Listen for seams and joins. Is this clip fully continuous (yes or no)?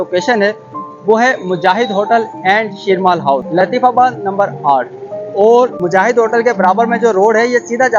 yes